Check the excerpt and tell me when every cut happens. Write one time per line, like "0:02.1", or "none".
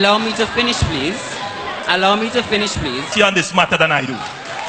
0:03.1